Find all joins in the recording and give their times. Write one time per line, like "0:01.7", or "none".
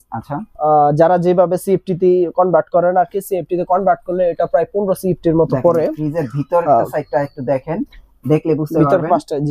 none